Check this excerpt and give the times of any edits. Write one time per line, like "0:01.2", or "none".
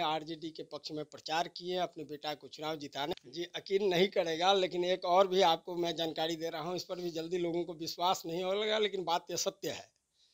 0:03.1